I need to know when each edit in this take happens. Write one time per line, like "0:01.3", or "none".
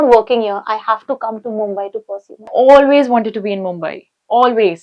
0:02.5